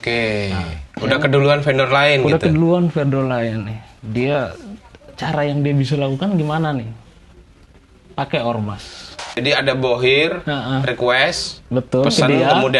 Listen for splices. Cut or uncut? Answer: cut